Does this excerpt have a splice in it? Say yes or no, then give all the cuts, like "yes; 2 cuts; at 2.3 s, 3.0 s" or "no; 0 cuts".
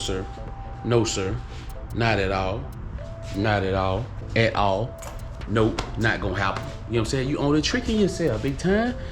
no; 0 cuts